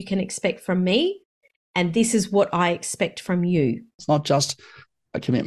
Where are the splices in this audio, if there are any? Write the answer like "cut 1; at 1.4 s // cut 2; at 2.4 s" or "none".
cut 1; at 4.0 s